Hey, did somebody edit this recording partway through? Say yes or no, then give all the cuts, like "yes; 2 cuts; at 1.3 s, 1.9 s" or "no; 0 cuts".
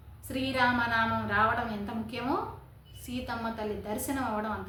no; 0 cuts